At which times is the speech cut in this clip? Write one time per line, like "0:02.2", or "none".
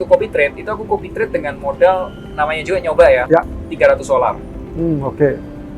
none